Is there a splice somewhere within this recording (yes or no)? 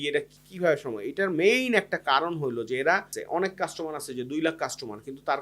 yes